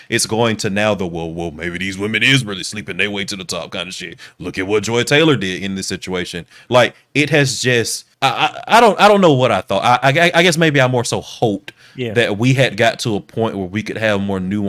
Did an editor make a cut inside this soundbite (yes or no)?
yes